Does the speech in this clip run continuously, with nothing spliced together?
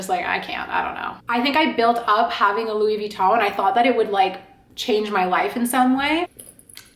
no; 1 cut; at 1.2 s

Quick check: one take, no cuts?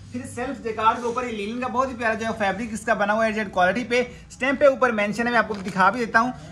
yes; 0 cuts

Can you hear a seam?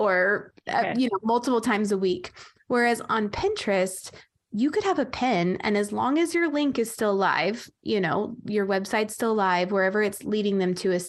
no; 0 cuts

